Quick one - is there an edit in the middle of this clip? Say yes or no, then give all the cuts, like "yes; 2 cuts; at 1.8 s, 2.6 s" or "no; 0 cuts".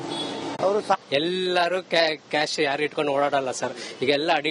no; 0 cuts